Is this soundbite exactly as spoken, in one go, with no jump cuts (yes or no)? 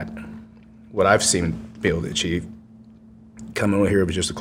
yes